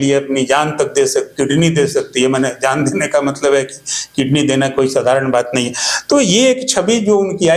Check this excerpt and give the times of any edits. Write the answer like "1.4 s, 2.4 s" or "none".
none